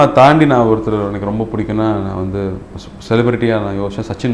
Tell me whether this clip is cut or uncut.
uncut